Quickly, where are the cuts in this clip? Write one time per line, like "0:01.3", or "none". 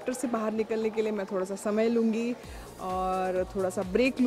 none